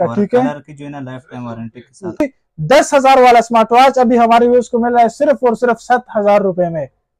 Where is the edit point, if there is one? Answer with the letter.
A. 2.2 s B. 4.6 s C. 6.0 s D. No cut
A